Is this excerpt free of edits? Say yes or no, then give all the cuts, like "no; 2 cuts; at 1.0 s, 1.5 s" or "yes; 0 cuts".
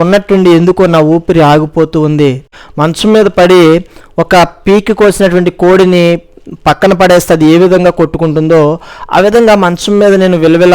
no; 1 cut; at 2.6 s